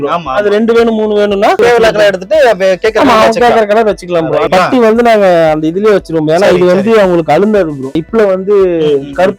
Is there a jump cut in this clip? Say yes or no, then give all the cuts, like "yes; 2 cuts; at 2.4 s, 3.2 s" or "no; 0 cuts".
yes; 3 cuts; at 1.6 s, 4.5 s, 8.0 s